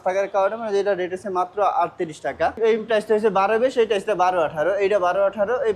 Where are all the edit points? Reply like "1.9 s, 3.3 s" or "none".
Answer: 2.6 s